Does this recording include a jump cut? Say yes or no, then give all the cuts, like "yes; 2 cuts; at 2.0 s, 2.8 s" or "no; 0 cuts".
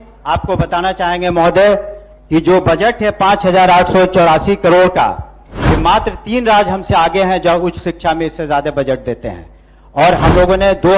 no; 0 cuts